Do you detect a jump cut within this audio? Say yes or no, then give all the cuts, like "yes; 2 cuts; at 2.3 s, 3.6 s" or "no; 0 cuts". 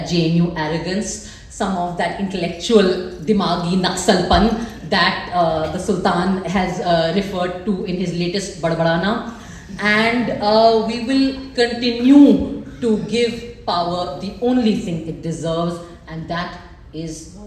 no; 0 cuts